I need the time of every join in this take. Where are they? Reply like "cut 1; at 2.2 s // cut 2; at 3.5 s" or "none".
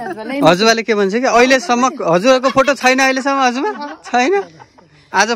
none